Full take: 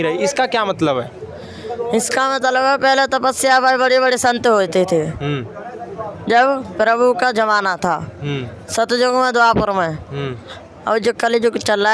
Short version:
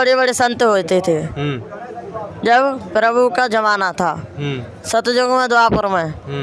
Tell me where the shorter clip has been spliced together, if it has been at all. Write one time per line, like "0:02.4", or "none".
none